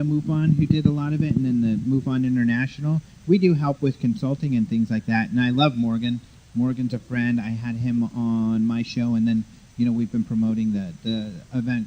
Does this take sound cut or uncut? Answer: uncut